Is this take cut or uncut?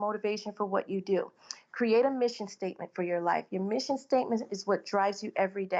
uncut